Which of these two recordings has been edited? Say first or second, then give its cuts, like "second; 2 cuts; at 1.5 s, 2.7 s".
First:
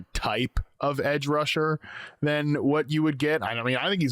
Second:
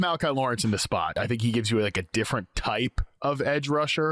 second; 1 cut; at 1.2 s